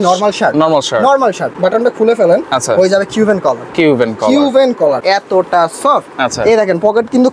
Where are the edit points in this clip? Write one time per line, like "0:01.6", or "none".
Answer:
0:01.5
0:05.0